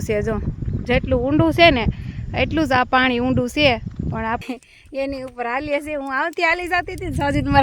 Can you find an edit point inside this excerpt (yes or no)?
yes